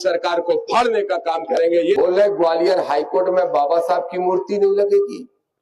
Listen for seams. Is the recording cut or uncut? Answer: cut